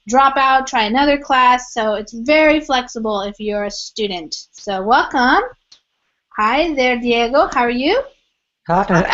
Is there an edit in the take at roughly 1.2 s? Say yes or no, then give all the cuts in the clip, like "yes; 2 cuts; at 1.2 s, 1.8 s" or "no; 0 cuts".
yes; 1 cut; at 1.2 s